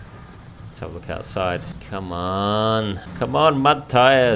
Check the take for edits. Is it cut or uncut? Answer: cut